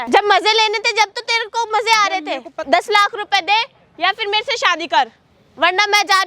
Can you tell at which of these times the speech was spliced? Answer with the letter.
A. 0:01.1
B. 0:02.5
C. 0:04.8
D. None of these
B